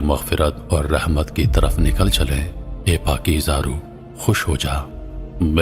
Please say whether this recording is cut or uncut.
uncut